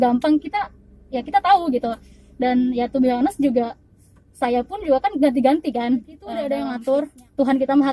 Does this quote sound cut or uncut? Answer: cut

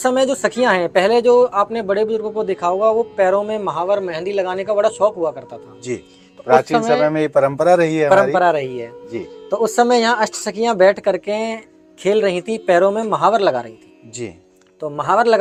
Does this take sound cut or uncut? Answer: uncut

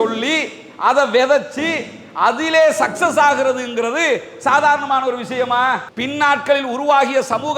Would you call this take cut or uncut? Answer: cut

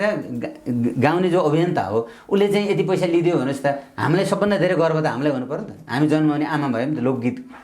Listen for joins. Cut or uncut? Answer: uncut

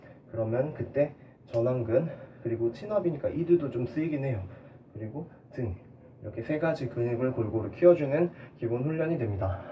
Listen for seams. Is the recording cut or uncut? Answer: uncut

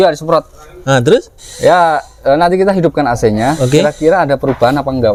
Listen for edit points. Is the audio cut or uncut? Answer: uncut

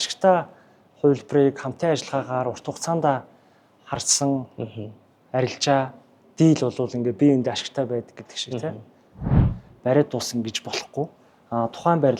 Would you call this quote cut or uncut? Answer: cut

